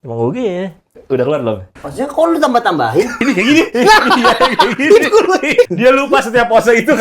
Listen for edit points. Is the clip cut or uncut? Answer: cut